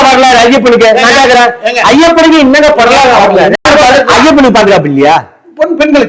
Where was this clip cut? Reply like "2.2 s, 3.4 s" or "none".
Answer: 3.6 s